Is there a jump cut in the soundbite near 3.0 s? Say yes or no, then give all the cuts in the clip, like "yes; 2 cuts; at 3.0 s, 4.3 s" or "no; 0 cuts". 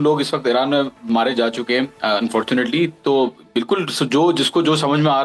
no; 0 cuts